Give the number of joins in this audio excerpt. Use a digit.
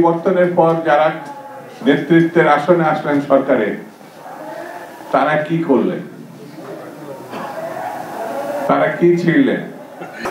0